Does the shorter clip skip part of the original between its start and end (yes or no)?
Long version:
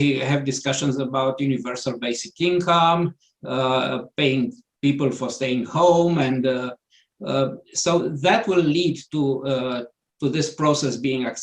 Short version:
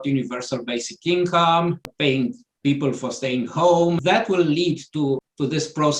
yes